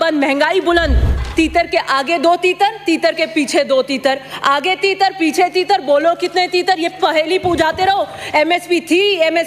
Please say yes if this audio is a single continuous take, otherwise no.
no